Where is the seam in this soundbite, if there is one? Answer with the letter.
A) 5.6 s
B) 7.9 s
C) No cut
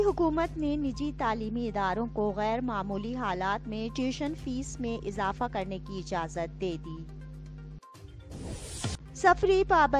B